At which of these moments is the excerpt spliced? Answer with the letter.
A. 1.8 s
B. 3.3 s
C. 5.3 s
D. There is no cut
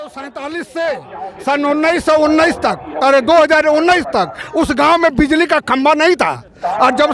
D